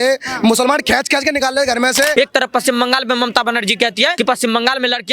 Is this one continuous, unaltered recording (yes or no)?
no